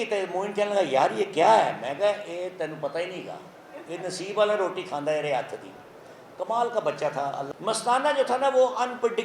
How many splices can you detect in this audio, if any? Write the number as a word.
one